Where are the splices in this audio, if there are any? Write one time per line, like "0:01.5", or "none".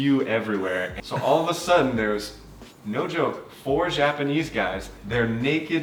0:00.9
0:04.9